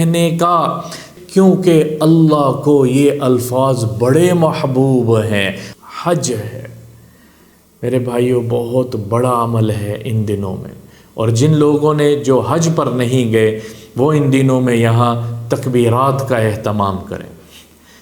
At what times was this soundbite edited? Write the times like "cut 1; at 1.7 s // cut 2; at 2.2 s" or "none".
cut 1; at 1.1 s // cut 2; at 5.6 s